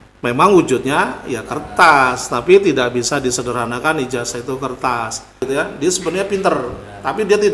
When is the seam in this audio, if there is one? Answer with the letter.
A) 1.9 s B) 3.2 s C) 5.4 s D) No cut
C